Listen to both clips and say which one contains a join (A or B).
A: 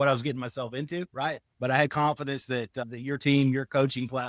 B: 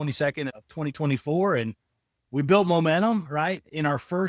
A